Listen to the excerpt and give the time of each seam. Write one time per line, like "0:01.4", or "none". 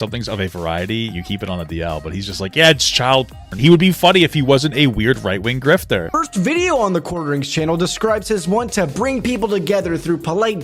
0:01.1
0:03.6
0:06.1